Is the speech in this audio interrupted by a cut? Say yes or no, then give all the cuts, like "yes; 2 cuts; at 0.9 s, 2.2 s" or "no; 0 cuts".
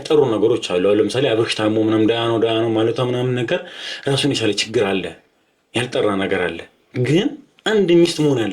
no; 0 cuts